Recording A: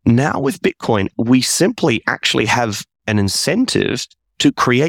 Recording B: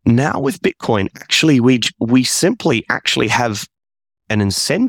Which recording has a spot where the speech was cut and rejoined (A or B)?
A